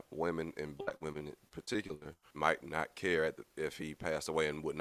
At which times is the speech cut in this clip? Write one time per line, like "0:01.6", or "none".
0:02.2